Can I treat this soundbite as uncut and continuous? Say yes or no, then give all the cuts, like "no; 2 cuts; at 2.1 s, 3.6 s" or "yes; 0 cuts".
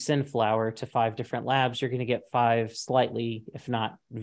yes; 0 cuts